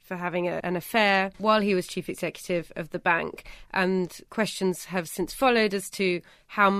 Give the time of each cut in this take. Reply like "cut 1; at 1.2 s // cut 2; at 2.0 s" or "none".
cut 1; at 1.1 s // cut 2; at 4.2 s